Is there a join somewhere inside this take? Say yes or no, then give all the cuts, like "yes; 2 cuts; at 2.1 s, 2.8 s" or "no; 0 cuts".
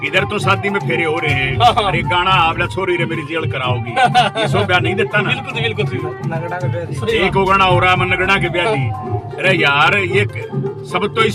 no; 0 cuts